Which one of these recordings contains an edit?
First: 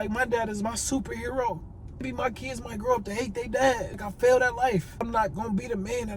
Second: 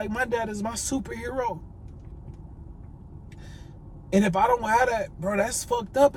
first; 3 cuts; at 2.0 s, 3.9 s, 5.1 s

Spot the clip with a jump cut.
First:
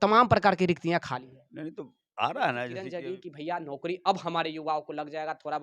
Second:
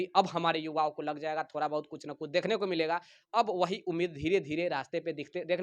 first; 1 cut; at 2.8 s

